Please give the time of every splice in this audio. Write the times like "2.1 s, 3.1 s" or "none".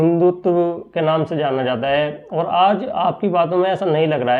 none